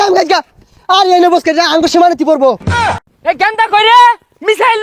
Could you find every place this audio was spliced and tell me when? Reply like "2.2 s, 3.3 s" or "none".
3.0 s